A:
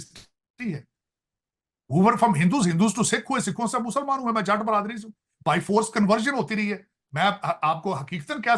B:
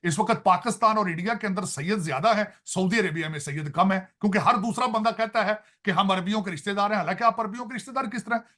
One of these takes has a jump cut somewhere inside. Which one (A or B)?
A